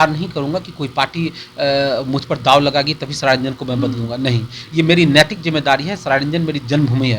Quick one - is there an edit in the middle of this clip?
no; 0 cuts

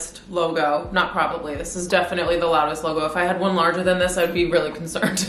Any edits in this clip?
no; 0 cuts

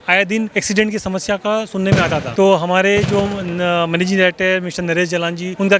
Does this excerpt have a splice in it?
no; 0 cuts

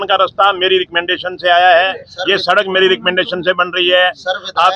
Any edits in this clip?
no; 0 cuts

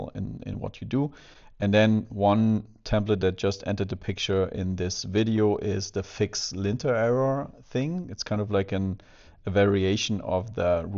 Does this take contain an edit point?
no; 0 cuts

